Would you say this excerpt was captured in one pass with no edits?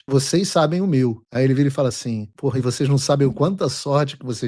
yes; 0 cuts

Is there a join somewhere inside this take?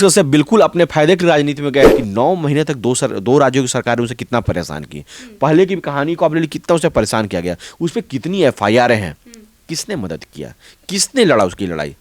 yes; 1 cut; at 1.9 s

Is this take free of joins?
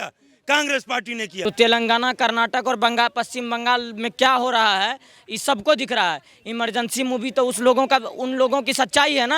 no; 1 cut; at 1.4 s

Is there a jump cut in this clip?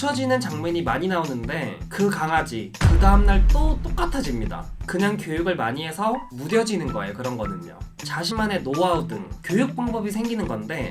yes; 1 cut; at 8.0 s

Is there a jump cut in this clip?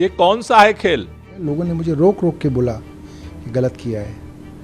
yes; 1 cut; at 1.3 s

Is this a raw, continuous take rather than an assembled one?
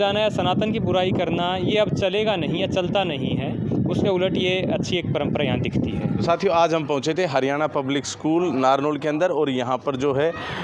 yes; 0 cuts

